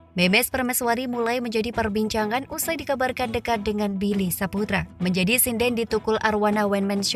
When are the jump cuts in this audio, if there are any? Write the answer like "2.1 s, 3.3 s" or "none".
4.9 s